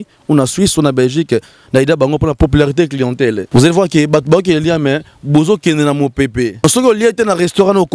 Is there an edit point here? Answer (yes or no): yes